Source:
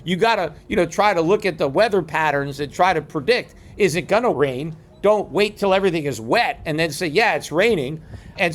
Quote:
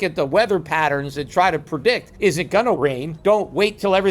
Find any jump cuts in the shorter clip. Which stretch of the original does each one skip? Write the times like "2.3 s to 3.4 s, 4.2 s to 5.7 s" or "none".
3.5 s to 3.7 s, 4.7 s to 4.9 s